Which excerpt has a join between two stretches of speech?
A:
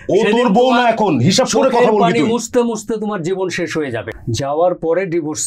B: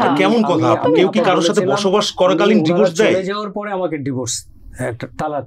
A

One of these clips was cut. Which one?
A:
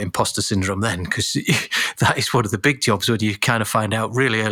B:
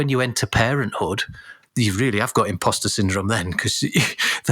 B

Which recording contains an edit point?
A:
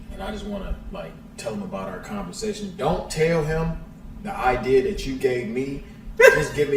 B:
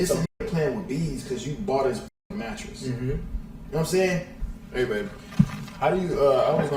B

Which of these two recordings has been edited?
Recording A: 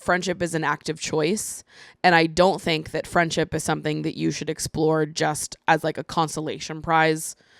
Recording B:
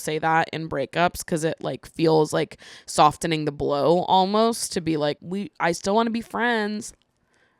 B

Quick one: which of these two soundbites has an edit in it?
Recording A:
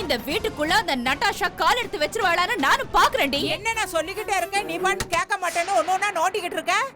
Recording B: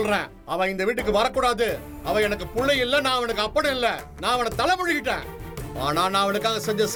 A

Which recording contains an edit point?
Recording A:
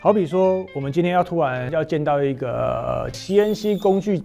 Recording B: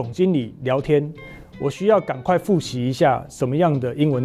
A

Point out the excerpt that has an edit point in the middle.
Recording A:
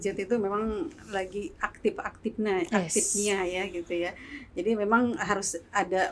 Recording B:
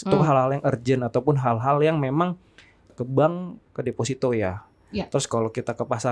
B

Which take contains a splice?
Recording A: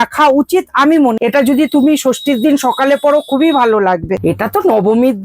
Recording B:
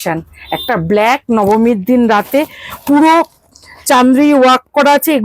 A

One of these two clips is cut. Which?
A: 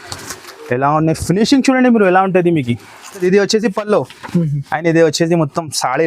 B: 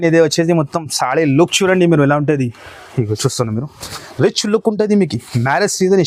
A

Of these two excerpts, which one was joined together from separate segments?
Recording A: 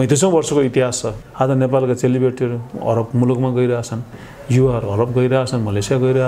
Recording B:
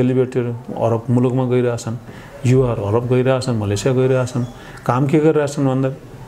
A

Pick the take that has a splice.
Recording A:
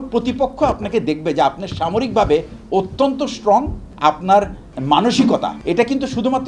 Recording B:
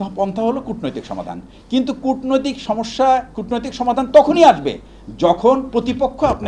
A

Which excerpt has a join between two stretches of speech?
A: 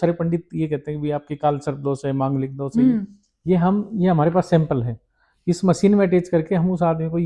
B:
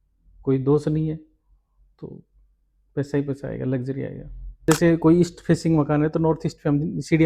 B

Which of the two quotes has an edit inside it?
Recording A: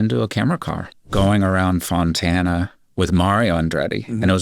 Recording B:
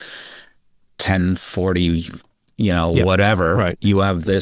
A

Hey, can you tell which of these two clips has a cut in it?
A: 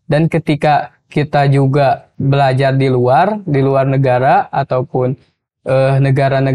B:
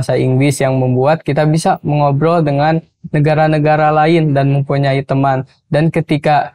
A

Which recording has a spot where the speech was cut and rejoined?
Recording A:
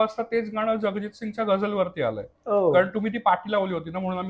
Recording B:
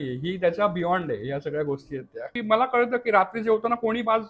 B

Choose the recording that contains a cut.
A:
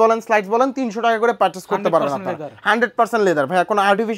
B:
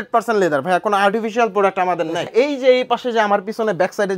B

